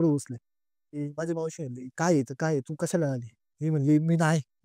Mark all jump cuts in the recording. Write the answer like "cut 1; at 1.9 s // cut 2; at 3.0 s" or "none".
cut 1; at 1.1 s

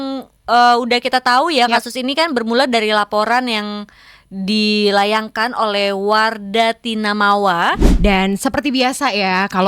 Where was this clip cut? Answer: cut 1; at 7.9 s

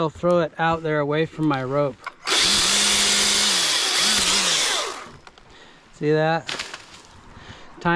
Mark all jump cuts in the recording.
none

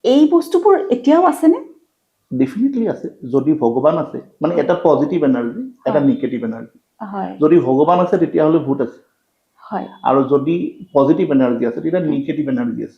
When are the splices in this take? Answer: none

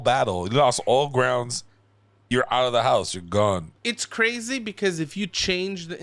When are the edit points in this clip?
cut 1; at 3.7 s

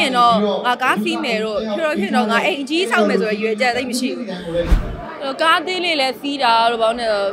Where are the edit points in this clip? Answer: cut 1; at 4.8 s

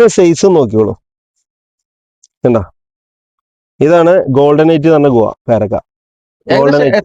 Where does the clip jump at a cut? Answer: none

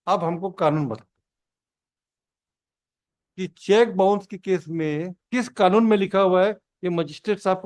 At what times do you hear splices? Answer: cut 1; at 5.2 s

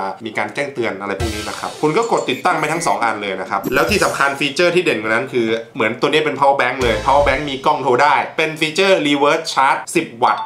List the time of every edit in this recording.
cut 1; at 3.6 s

